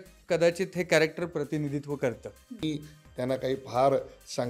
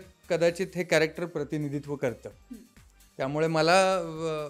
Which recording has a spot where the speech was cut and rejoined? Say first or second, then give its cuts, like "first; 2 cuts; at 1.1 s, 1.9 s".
first; 1 cut; at 2.6 s